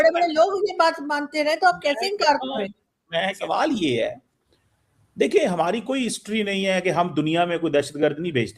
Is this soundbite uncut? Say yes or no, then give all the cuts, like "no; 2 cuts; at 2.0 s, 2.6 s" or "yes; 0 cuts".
no; 1 cut; at 3.4 s